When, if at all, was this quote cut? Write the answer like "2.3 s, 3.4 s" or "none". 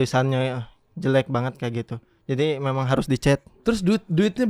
3.5 s